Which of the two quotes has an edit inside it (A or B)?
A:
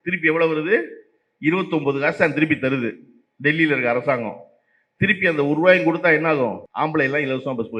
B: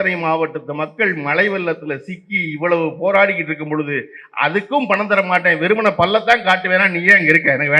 A